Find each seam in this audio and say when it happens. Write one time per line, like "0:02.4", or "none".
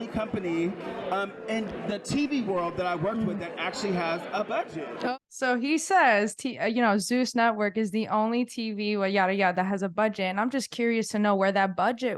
0:05.2